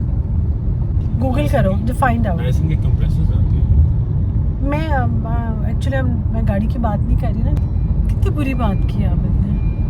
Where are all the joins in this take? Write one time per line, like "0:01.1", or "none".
0:07.6